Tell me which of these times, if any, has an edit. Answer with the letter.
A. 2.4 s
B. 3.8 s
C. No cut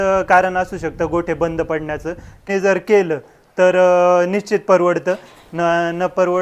A